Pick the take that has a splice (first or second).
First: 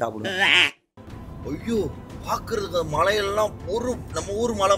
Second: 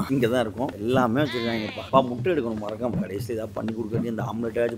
first